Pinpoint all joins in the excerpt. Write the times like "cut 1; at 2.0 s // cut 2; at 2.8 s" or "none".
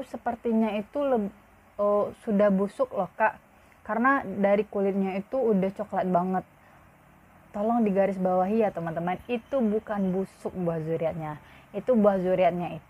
none